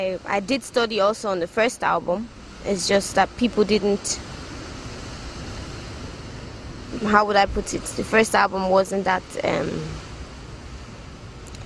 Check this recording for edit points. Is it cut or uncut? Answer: uncut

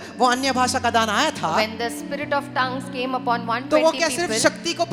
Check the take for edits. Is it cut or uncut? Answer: uncut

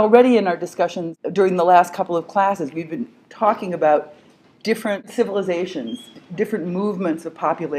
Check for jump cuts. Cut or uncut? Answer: uncut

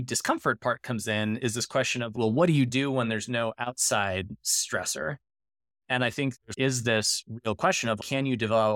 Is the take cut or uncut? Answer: cut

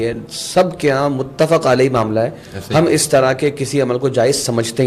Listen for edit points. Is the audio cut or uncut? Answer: uncut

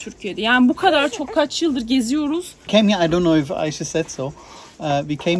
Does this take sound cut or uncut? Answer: cut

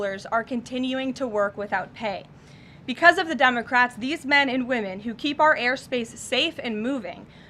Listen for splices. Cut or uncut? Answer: uncut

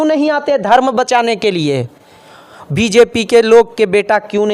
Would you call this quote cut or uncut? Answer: uncut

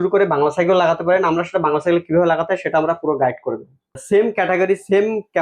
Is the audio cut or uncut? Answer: cut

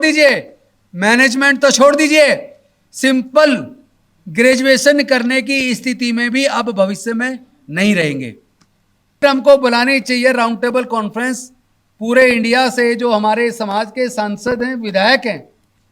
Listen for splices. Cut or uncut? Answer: cut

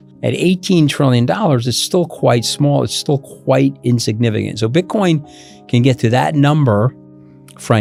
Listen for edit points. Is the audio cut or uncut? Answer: uncut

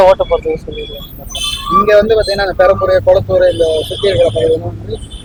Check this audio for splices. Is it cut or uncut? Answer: uncut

